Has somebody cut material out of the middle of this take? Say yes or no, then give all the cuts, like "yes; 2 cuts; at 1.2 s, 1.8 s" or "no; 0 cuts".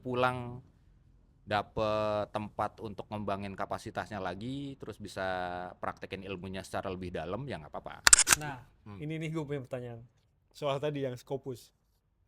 yes; 1 cut; at 8.2 s